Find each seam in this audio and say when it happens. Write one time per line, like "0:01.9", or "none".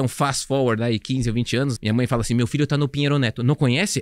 0:01.8